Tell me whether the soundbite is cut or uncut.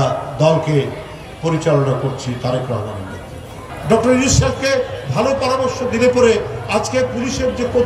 cut